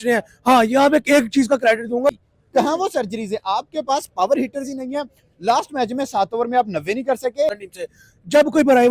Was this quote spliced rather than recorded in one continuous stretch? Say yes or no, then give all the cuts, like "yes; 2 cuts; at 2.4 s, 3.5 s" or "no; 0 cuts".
yes; 2 cuts; at 2.1 s, 7.6 s